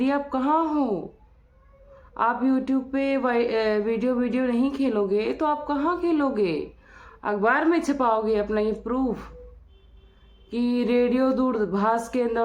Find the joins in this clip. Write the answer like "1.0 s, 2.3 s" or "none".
none